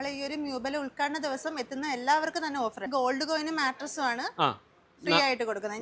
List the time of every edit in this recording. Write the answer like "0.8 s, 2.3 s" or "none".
2.8 s